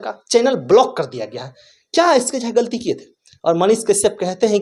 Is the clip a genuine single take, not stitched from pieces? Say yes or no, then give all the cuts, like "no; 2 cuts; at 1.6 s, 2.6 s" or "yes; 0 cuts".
yes; 0 cuts